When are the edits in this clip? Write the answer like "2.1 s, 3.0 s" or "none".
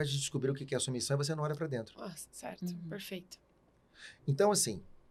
none